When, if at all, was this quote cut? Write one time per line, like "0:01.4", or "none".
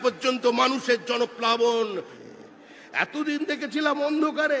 0:02.2